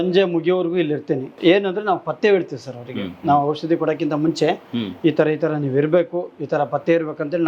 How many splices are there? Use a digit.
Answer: 1